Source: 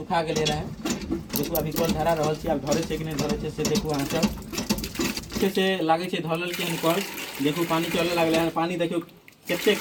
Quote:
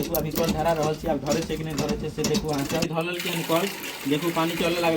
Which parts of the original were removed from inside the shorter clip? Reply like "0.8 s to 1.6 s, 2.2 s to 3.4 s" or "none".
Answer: 4.2 s to 6.2 s